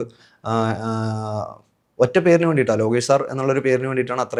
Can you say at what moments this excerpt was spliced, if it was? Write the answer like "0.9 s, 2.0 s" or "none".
none